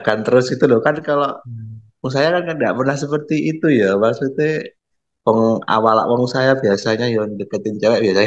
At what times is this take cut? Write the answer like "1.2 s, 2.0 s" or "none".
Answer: none